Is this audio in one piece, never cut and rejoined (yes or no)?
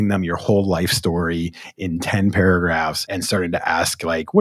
no